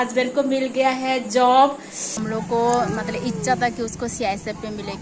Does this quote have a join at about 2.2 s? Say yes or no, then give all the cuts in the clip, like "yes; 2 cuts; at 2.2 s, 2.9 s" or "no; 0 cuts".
yes; 1 cut; at 2.2 s